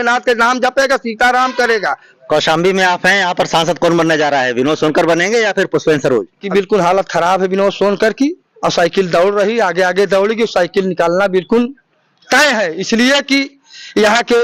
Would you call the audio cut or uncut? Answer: uncut